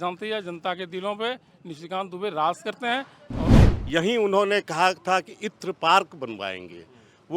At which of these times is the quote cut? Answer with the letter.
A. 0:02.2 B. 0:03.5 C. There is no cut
B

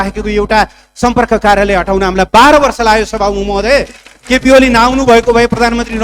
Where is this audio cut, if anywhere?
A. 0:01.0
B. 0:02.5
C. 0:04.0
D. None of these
D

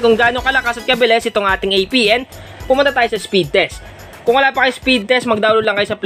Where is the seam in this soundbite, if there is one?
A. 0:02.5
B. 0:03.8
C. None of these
C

